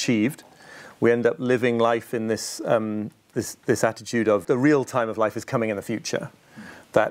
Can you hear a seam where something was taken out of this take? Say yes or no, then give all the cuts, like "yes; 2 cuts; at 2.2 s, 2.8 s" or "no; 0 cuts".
yes; 1 cut; at 4.4 s